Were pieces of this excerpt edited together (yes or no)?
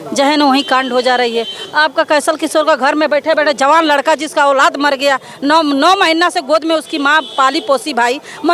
no